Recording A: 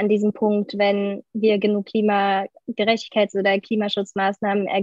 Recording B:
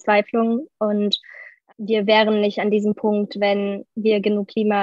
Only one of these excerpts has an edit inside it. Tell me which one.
B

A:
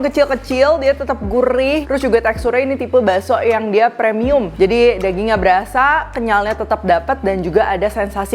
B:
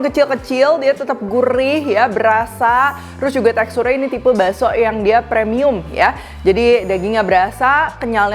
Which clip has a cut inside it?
A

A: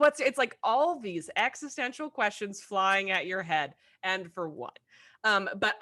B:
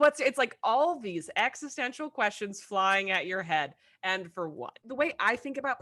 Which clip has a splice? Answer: B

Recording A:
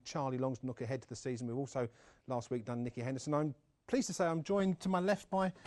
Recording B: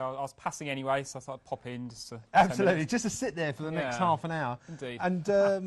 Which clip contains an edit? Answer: B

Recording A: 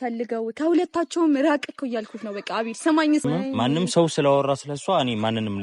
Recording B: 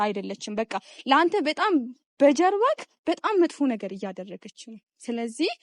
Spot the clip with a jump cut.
A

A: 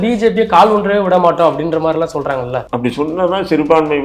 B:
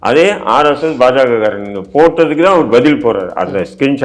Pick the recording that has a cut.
A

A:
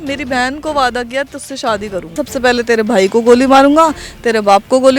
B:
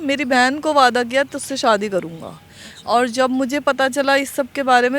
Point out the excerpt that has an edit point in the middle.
A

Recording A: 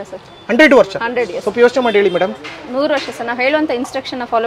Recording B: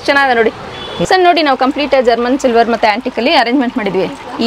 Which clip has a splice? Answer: B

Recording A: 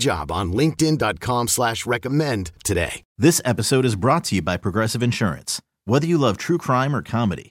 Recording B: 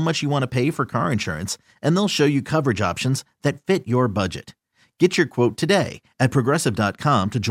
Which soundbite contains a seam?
A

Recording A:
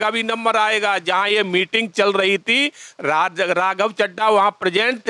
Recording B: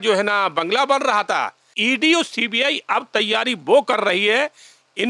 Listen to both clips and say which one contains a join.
B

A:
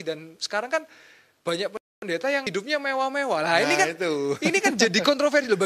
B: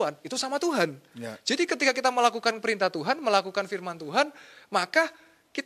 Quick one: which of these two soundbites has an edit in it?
A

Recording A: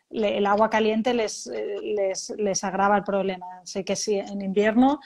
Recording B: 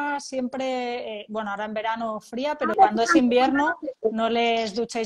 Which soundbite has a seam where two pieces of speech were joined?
B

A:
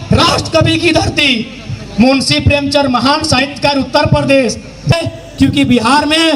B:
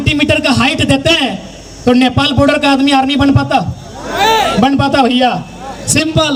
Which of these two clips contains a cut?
A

